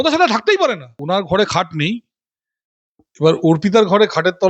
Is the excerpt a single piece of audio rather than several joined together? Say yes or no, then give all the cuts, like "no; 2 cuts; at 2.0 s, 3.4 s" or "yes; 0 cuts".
no; 1 cut; at 0.9 s